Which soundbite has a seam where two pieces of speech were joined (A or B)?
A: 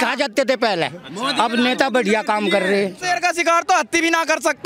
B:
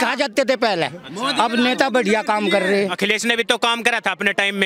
B